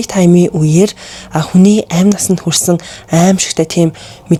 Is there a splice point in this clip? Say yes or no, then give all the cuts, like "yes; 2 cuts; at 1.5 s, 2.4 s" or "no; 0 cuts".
no; 0 cuts